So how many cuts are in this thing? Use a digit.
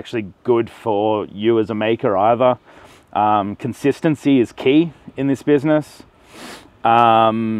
0